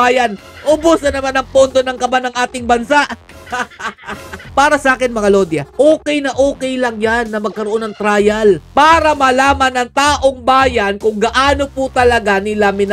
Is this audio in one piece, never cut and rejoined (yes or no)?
no